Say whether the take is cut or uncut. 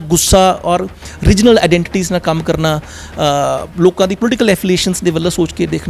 uncut